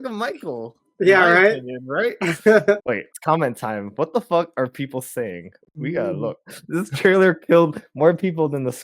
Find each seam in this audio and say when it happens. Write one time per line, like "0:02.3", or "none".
0:02.8
0:06.5